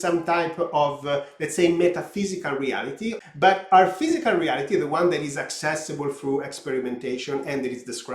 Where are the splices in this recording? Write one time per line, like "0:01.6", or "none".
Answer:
0:03.2